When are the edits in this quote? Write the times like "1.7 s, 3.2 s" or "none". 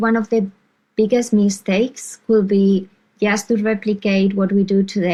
none

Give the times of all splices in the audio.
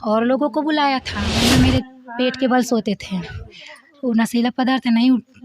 1.3 s

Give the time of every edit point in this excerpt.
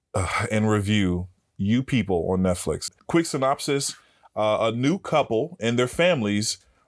2.9 s

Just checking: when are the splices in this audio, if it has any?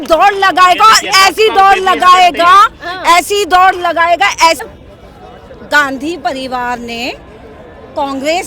4.6 s

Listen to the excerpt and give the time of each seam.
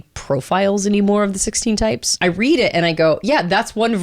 2.1 s

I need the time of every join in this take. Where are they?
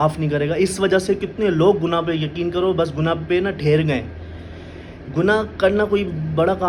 none

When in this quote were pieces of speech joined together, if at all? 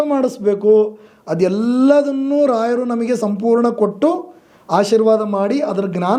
none

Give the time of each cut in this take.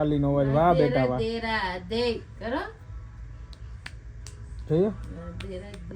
none

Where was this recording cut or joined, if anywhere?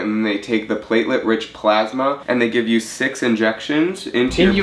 2.2 s

